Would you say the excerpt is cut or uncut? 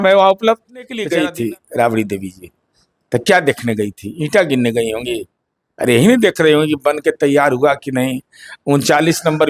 cut